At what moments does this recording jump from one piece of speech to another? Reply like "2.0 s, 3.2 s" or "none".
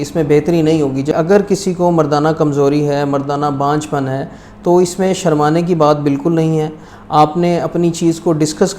1.1 s

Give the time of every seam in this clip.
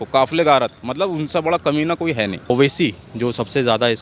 2.5 s

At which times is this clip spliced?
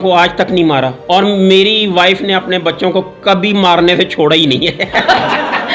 none

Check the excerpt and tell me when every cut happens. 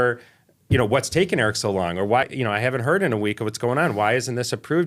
2.3 s

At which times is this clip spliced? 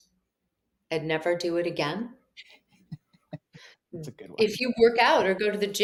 none

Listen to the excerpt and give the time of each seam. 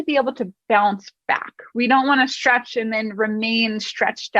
none

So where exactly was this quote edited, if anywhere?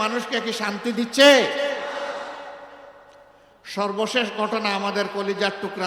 none

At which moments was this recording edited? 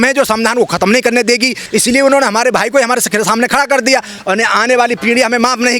1.6 s, 4.1 s

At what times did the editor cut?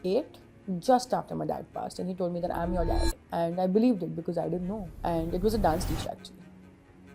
4.9 s

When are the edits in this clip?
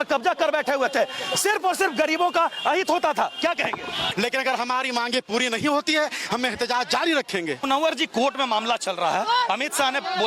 4.0 s, 7.7 s

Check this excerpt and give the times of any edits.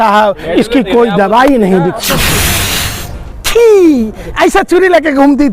2.1 s

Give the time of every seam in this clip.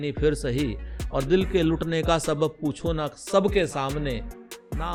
none

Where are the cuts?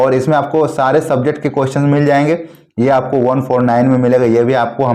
none

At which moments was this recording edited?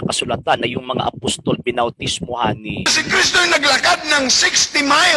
2.9 s

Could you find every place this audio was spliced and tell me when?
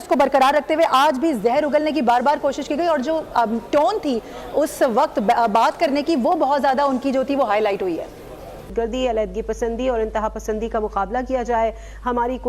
8.7 s

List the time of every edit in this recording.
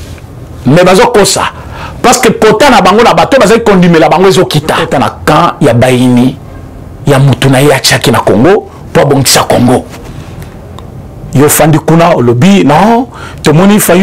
4.8 s

